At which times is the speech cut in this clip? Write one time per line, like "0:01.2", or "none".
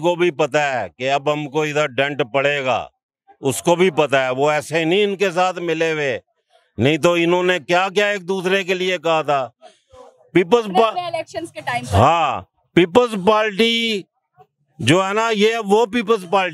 none